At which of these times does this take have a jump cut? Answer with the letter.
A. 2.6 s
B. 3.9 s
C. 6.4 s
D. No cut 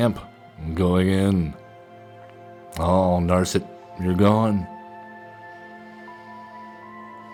D